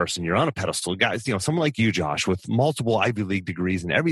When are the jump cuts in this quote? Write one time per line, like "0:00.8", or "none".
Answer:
none